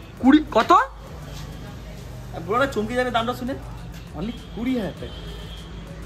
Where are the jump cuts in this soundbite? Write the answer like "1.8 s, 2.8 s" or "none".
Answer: none